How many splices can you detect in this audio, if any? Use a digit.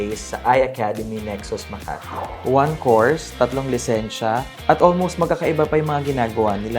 1